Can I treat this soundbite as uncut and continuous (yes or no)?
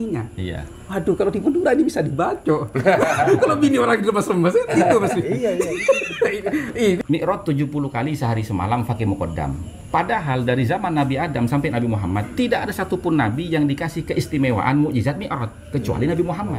no